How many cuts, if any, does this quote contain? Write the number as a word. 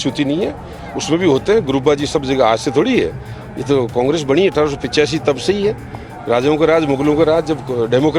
zero